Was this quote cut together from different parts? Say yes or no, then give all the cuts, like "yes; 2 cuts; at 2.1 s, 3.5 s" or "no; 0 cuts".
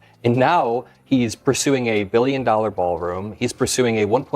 no; 0 cuts